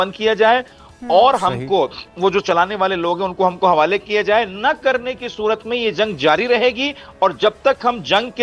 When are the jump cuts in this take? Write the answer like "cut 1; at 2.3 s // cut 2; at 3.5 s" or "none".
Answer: none